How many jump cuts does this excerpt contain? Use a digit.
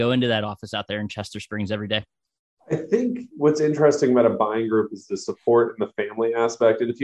0